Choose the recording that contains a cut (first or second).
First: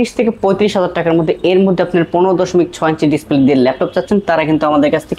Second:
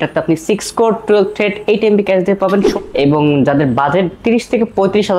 second